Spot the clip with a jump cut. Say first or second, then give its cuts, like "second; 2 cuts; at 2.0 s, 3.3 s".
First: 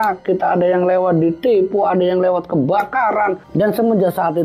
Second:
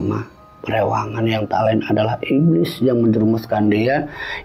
first; 1 cut; at 3.4 s